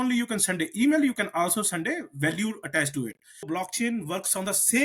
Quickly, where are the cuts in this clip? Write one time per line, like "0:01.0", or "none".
0:03.4